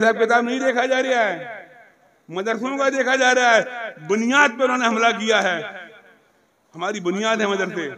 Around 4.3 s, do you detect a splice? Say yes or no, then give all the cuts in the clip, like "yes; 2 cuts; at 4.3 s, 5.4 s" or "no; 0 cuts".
no; 0 cuts